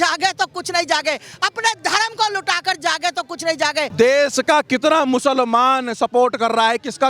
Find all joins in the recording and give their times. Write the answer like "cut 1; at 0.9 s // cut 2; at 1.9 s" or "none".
cut 1; at 3.9 s

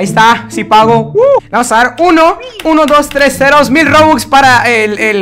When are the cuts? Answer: cut 1; at 1.5 s

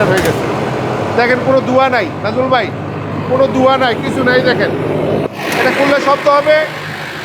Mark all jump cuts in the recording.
cut 1; at 5.3 s

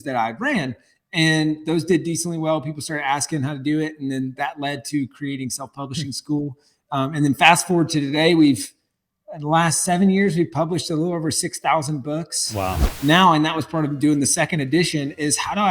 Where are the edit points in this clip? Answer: cut 1; at 12.9 s

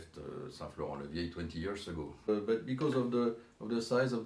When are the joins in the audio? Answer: cut 1; at 2.3 s

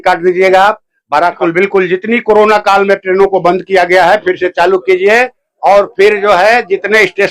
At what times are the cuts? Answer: cut 1; at 1.4 s

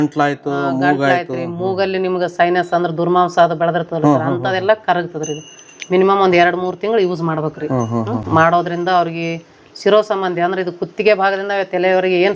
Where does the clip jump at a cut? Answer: none

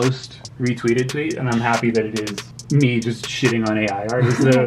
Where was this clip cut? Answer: cut 1; at 2.5 s

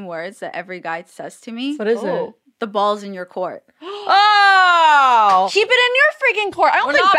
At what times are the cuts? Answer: cut 1; at 1.8 s // cut 2; at 5.5 s

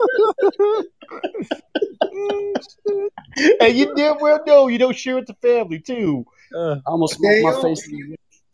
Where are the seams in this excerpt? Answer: none

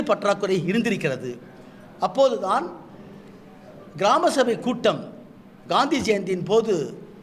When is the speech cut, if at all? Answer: none

